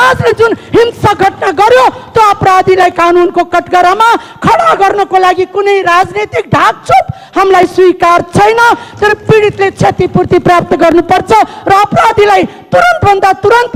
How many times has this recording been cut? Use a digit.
0